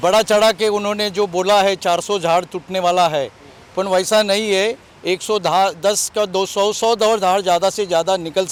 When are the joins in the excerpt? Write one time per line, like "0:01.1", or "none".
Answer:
none